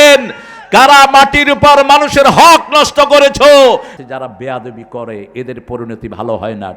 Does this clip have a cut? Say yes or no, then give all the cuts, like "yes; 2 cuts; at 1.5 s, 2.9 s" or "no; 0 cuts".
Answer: yes; 1 cut; at 4.0 s